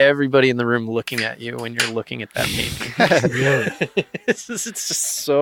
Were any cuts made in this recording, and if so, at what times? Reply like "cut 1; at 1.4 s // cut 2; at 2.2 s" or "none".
none